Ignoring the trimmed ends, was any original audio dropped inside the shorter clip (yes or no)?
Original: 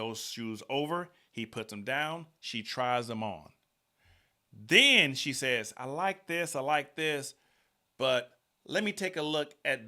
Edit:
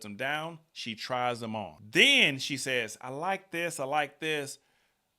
yes